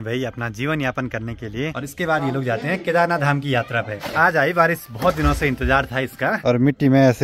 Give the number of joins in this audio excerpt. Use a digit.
3